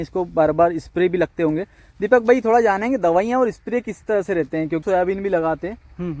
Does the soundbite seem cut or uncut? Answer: cut